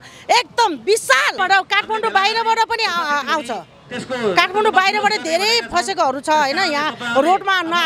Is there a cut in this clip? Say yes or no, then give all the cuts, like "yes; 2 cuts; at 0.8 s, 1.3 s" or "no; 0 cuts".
yes; 1 cut; at 1.3 s